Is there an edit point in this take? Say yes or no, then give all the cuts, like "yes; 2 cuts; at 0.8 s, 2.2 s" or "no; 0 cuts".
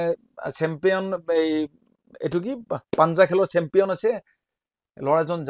no; 0 cuts